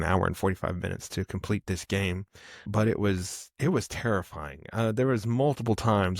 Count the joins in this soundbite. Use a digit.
1